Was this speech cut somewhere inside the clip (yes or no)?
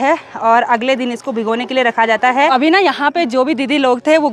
yes